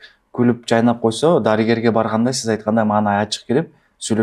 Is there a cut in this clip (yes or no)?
no